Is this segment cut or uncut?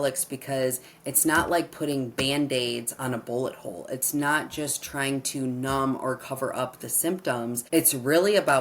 cut